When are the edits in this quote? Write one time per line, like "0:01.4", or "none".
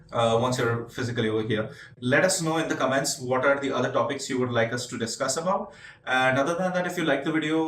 0:01.9